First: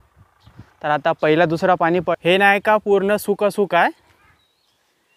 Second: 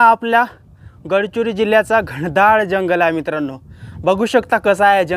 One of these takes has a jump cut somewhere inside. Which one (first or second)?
first